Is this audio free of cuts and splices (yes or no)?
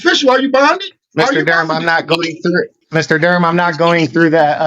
no